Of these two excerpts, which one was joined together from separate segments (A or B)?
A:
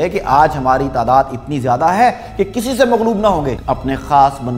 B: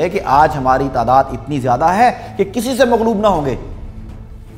A